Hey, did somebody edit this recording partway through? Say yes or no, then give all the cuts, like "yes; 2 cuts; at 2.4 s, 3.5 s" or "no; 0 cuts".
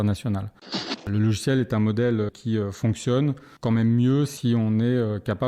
yes; 3 cuts; at 1.0 s, 2.3 s, 3.5 s